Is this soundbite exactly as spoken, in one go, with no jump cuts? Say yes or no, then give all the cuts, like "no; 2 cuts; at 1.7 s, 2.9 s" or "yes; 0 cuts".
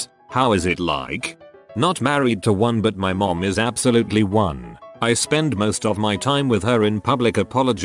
no; 1 cut; at 1.6 s